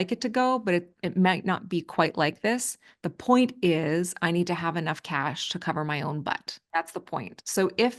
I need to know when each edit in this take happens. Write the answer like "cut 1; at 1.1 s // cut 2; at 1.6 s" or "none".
cut 1; at 6.6 s